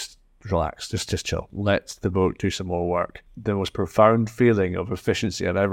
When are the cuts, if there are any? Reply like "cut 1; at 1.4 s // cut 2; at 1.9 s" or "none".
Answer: cut 1; at 1.5 s // cut 2; at 3.3 s